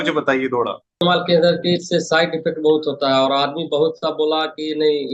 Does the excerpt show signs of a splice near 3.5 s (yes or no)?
no